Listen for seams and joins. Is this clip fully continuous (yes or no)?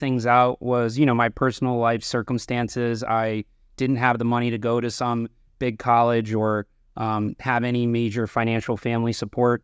yes